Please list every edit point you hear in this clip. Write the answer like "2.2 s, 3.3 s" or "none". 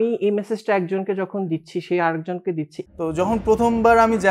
2.8 s

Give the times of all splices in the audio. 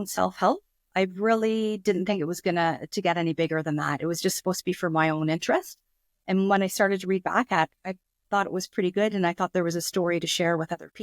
7.9 s

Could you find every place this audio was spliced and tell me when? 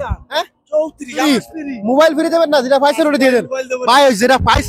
1.2 s

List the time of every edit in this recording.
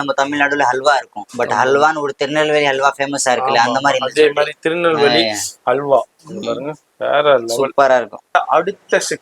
8.3 s

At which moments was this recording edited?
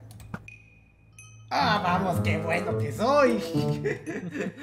none

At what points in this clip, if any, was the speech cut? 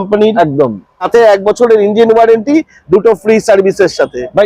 0.9 s

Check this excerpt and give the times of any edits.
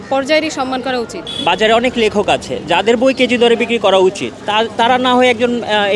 1.2 s, 4.3 s

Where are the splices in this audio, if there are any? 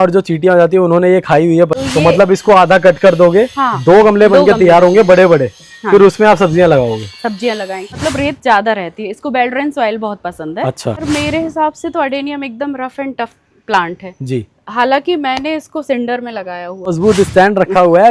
1.8 s, 8.0 s, 11.0 s, 16.9 s

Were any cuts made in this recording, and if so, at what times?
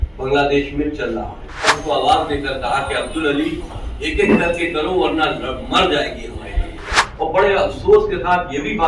1.8 s, 7.0 s

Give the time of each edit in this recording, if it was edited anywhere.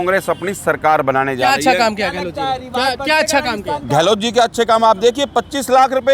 none

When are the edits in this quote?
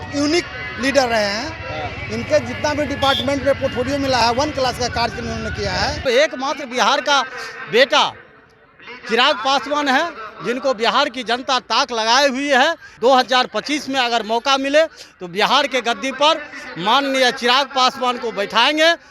6.0 s, 12.9 s

